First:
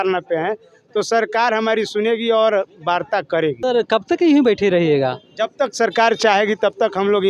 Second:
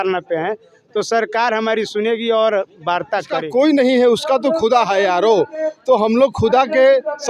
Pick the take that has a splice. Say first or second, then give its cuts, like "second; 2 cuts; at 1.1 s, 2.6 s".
second; 1 cut; at 3.4 s